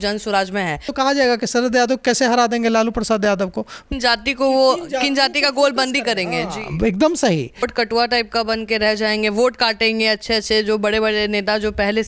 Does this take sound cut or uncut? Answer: cut